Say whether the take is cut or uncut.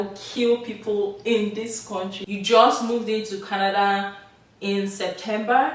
cut